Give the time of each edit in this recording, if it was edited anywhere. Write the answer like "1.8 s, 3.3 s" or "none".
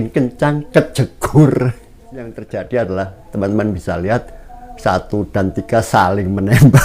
2.4 s